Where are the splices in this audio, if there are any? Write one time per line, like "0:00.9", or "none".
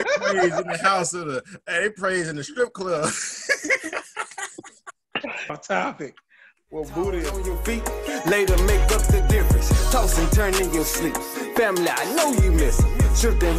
0:07.5